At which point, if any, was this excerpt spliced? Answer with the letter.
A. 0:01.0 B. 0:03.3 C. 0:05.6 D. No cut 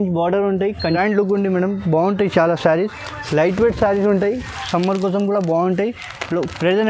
A